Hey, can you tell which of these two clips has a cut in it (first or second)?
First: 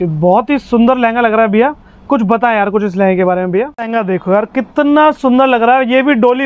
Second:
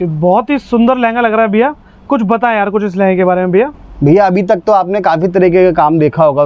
first